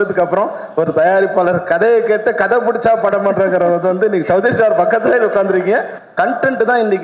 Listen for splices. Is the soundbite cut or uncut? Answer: cut